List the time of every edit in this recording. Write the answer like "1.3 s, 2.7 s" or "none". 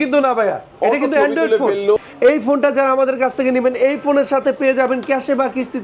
2.0 s